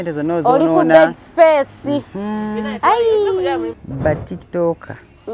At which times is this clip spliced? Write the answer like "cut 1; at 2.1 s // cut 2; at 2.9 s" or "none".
cut 1; at 3.8 s